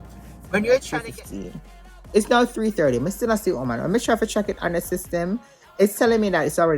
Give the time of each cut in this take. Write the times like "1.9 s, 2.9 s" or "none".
1.0 s